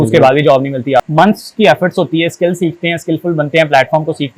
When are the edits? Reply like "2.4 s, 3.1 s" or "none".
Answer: 1.1 s